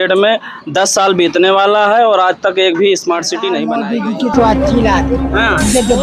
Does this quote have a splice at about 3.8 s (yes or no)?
yes